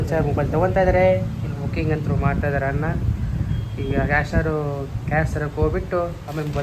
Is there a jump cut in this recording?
no; 0 cuts

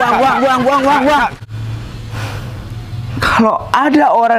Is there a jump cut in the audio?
yes; 1 cut; at 1.3 s

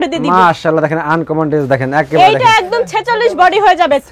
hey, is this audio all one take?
yes; 0 cuts

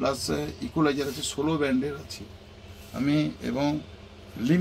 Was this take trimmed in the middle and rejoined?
no; 0 cuts

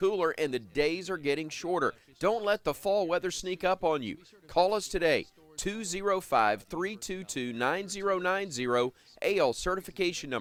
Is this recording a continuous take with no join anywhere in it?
yes; 0 cuts

